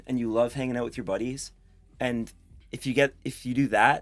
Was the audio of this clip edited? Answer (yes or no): no